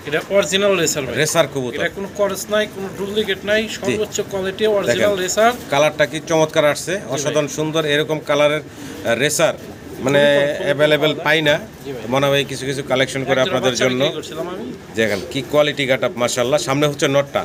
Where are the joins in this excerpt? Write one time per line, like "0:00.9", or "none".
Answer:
none